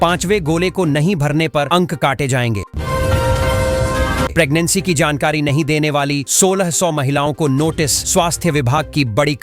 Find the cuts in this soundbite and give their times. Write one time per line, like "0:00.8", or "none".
0:02.7
0:04.3